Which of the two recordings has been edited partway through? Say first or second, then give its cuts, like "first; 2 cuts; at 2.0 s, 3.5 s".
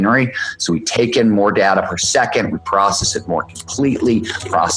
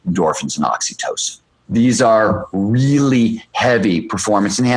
second; 1 cut; at 1.5 s